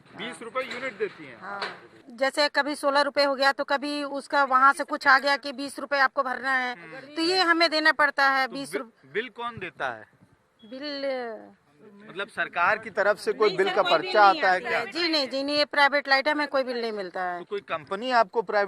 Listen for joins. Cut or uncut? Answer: cut